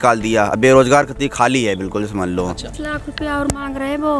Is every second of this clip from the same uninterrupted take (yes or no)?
no